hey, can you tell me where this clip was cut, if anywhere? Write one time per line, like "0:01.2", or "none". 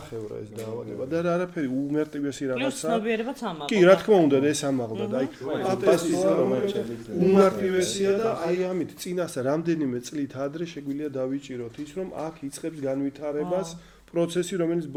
none